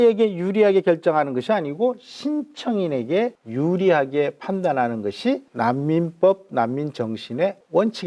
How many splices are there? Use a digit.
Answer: 0